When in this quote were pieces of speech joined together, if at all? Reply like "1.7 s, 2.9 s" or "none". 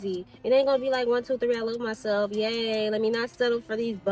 none